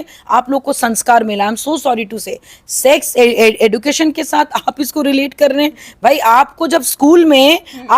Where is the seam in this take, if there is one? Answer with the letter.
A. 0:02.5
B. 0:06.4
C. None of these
C